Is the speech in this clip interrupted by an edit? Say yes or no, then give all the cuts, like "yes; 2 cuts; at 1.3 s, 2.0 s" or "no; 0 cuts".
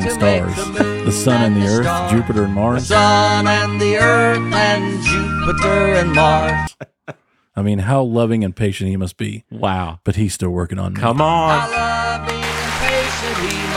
no; 0 cuts